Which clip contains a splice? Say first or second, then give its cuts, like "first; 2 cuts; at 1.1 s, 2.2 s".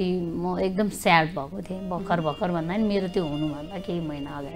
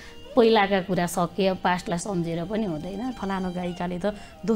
second; 1 cut; at 3.1 s